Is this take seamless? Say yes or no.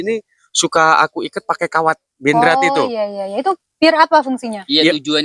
yes